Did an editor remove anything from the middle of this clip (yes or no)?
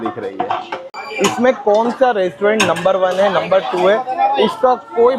yes